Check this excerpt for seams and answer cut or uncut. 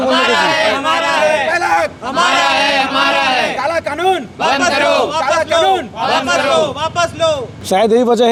uncut